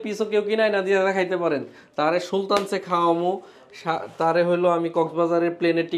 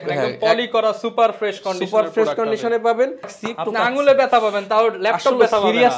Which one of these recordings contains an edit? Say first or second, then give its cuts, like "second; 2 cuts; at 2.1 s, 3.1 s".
second; 1 cut; at 3.4 s